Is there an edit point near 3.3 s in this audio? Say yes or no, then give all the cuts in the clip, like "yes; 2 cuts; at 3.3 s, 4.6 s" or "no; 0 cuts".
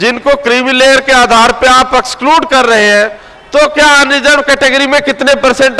no; 0 cuts